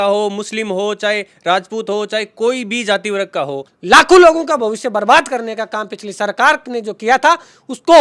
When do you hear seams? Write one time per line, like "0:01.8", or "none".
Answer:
0:03.7